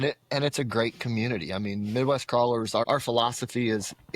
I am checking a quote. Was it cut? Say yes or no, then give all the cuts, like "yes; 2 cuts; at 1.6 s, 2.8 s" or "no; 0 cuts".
yes; 1 cut; at 2.8 s